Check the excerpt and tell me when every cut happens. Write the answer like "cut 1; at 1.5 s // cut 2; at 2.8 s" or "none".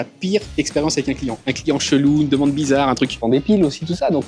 cut 1; at 3.2 s

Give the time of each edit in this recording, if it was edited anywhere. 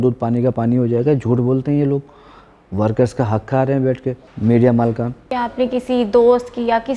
cut 1; at 4.3 s // cut 2; at 5.3 s

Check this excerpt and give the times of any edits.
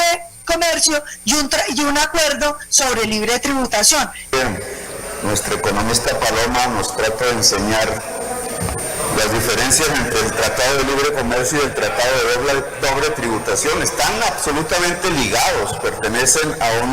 cut 1; at 4.3 s

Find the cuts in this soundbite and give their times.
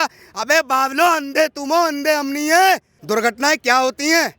cut 1; at 2.9 s

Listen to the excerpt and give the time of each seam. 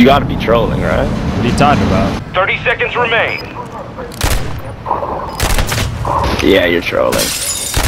none

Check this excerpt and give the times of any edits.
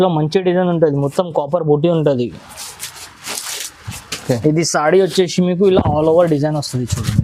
none

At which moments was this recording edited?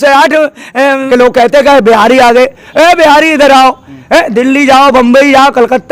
cut 1; at 1.0 s

